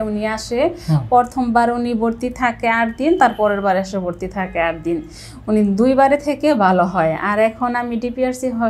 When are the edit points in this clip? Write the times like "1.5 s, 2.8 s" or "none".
none